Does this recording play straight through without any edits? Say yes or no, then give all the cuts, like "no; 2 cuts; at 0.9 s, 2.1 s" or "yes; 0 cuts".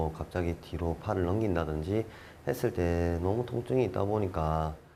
yes; 0 cuts